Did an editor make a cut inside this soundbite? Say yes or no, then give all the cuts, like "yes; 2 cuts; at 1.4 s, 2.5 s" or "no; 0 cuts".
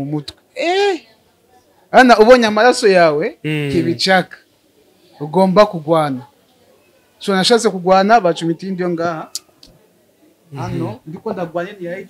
no; 0 cuts